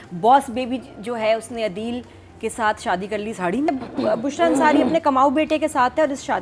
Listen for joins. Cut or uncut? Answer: cut